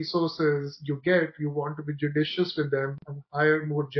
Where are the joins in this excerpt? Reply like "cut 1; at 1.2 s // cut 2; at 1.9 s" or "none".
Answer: none